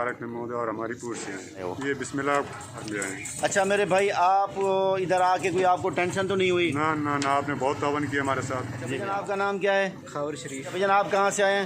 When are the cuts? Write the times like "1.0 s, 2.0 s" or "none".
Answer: 1.7 s, 2.9 s, 8.9 s, 10.8 s